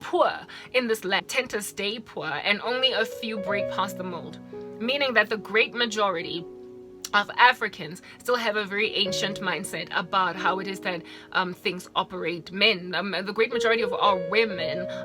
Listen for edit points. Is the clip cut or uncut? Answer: cut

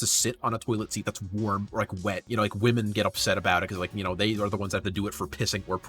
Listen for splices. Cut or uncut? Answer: cut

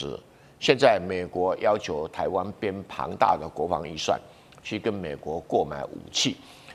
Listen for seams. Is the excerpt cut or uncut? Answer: uncut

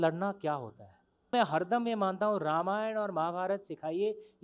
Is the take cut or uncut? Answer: cut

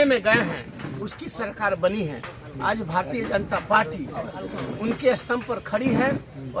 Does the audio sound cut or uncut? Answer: uncut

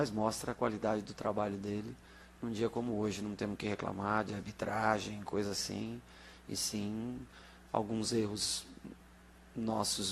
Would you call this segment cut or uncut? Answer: uncut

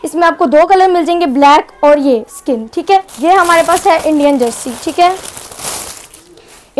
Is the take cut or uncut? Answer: cut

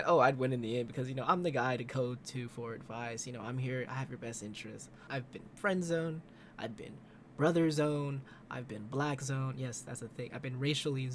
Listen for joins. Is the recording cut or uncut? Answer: cut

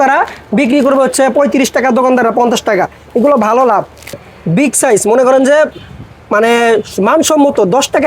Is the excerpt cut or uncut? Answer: cut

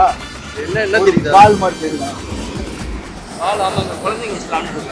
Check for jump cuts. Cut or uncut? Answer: uncut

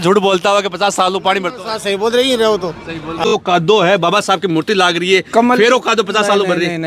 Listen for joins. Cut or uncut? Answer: cut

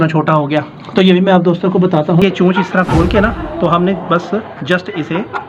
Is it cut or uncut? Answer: cut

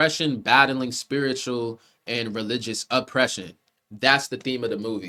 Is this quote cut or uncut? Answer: uncut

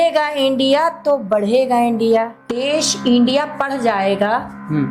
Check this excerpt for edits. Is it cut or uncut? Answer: cut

